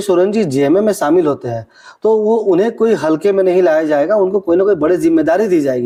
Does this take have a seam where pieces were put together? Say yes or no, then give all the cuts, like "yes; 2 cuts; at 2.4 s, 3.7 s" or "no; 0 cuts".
no; 0 cuts